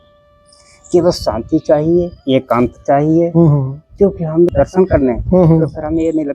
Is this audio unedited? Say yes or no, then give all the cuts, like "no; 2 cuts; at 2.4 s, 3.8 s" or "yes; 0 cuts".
no; 1 cut; at 4.5 s